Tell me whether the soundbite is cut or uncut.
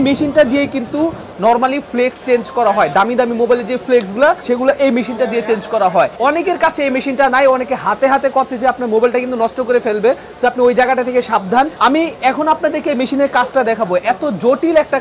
uncut